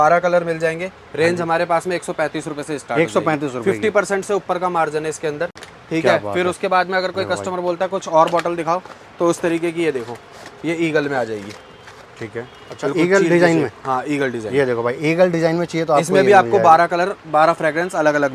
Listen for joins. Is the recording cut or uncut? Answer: uncut